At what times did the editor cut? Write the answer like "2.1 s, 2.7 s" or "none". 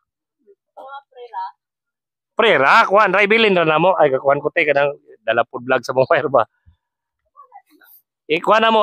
none